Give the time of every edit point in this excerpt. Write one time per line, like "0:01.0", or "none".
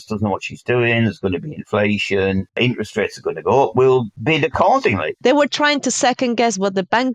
0:02.6
0:04.1
0:05.1